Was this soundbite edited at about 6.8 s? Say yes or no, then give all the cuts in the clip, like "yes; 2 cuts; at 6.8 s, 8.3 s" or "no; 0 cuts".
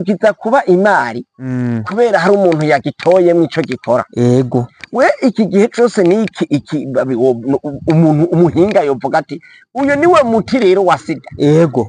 no; 0 cuts